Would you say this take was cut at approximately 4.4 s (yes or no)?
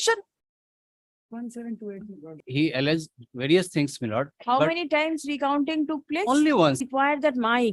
no